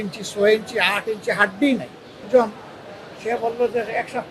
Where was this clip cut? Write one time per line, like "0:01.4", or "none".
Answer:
0:02.2